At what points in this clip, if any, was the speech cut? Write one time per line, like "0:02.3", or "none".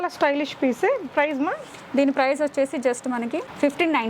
none